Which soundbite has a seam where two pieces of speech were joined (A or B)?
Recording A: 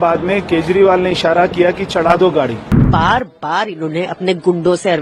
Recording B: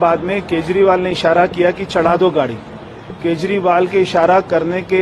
A